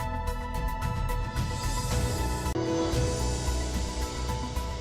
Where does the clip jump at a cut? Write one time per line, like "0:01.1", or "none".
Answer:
0:02.4